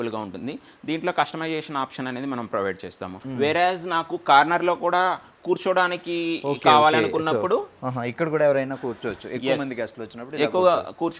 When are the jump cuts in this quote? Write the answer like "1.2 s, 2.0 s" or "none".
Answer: 3.1 s